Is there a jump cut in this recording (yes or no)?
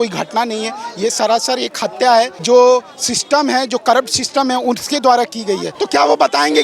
yes